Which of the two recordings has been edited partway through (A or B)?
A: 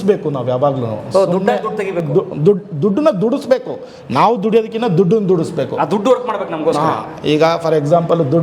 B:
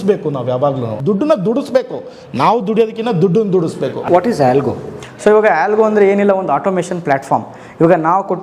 B